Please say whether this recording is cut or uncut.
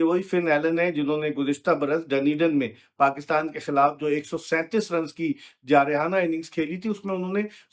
uncut